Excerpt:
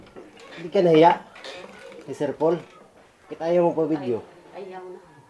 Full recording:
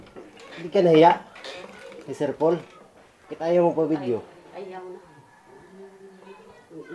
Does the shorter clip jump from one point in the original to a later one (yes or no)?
no